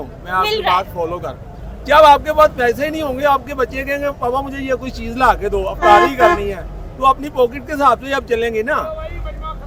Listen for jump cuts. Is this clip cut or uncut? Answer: uncut